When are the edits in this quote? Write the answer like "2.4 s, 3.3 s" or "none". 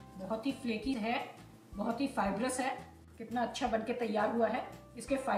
none

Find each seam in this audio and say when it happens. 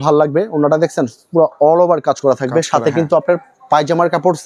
none

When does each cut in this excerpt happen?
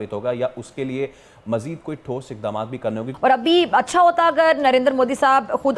3.1 s

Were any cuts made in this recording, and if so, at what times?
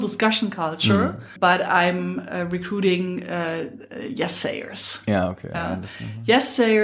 1.3 s

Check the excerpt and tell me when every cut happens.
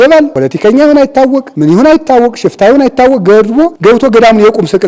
none

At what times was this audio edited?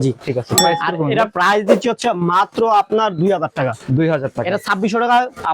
none

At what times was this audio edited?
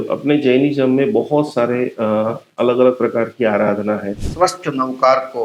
4.1 s

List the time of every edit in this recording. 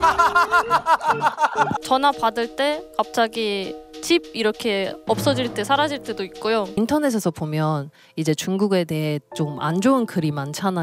1.8 s, 6.8 s

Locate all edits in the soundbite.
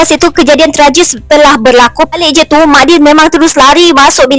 2.1 s

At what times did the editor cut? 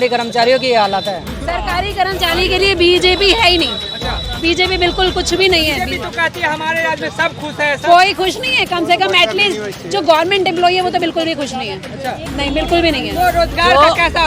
none

